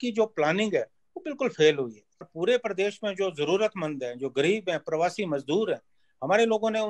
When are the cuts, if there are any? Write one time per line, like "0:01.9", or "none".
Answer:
0:02.3